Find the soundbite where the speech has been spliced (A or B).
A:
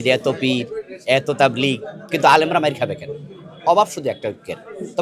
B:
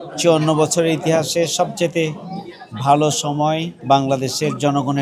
B